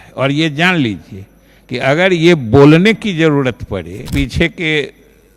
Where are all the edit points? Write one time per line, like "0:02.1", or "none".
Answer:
0:04.1